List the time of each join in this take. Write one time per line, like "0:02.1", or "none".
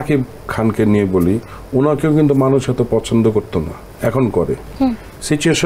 none